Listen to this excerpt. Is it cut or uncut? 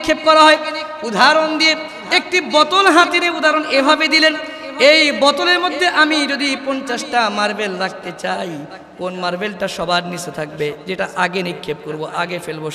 uncut